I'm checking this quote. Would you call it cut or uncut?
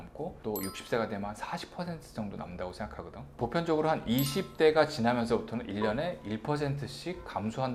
uncut